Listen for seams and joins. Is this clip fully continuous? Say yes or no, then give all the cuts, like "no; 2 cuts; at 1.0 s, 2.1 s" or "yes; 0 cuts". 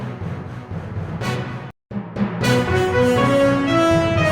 no; 1 cut; at 1.4 s